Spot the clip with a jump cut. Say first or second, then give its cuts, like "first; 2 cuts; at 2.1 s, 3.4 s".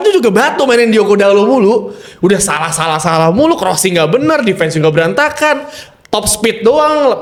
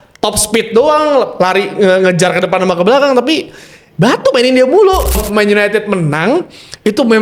second; 1 cut; at 5.1 s